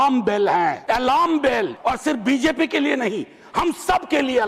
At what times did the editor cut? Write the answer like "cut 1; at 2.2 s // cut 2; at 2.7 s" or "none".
cut 1; at 0.8 s // cut 2; at 1.7 s